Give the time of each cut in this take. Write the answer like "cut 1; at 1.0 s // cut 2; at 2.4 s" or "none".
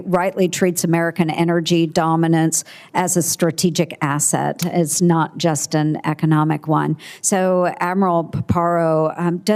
none